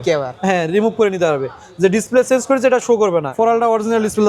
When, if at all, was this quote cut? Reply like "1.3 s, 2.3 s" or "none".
3.3 s